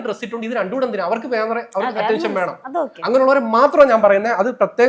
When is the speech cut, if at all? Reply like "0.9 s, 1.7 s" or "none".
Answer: none